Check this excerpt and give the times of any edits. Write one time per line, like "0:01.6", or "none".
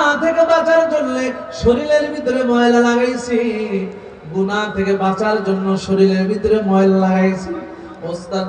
none